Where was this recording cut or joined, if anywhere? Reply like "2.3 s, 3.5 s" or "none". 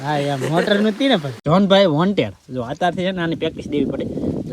1.3 s